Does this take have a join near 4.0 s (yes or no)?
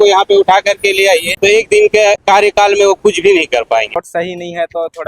yes